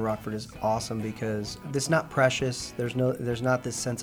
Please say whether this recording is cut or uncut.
cut